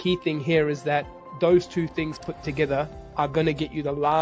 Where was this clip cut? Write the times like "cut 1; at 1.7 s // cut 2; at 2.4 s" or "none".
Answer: cut 1; at 1.2 s // cut 2; at 3.0 s